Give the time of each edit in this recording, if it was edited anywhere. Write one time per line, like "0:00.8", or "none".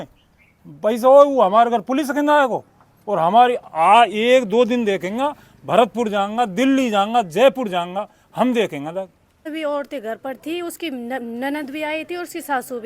0:09.4